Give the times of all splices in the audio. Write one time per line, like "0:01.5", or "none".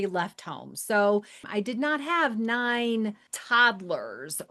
0:01.4
0:03.3